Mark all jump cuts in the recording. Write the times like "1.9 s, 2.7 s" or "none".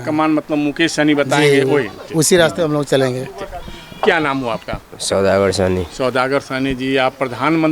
none